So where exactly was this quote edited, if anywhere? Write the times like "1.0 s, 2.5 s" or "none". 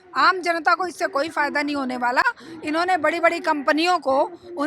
none